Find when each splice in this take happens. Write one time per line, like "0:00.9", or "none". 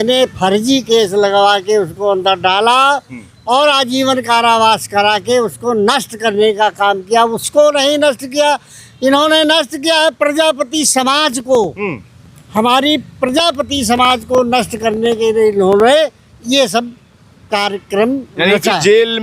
none